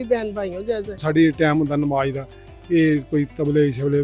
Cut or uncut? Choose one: cut